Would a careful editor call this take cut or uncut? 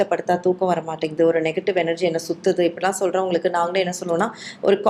uncut